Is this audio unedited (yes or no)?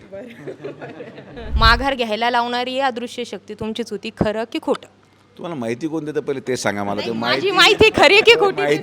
no